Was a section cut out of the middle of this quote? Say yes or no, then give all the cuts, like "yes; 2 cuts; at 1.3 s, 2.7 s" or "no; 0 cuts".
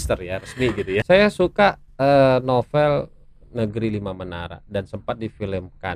yes; 1 cut; at 1.0 s